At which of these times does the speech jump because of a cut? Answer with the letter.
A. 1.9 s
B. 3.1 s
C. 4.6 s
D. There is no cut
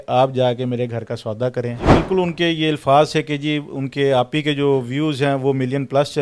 A